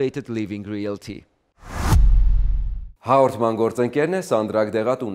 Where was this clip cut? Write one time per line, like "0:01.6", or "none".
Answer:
0:01.5